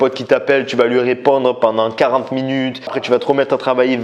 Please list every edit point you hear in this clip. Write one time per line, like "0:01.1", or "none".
none